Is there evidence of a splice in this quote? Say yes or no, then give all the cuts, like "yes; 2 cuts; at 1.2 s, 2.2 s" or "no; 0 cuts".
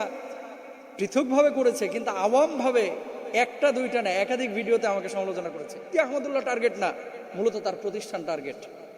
yes; 1 cut; at 5.9 s